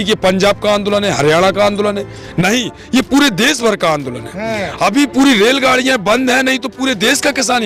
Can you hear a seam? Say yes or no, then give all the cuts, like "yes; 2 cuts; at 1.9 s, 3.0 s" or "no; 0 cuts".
no; 0 cuts